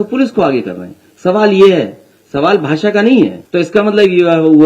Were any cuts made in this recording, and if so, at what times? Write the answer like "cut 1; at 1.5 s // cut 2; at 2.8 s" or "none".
cut 1; at 3.4 s

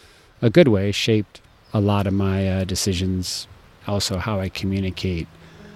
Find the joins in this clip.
none

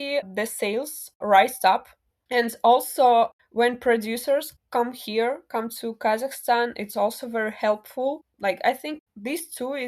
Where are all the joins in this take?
cut 1; at 2.1 s // cut 2; at 3.4 s // cut 3; at 4.6 s

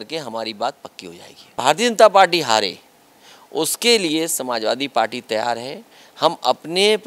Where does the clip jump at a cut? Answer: cut 1; at 1.6 s

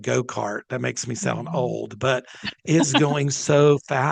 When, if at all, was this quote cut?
none

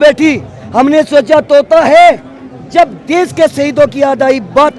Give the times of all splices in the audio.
none

